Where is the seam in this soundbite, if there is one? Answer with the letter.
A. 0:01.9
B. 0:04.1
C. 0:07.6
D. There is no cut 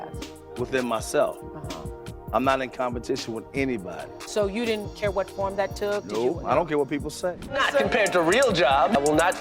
C